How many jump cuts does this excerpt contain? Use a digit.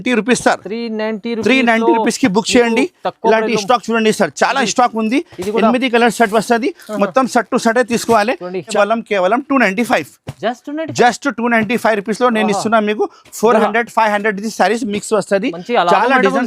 1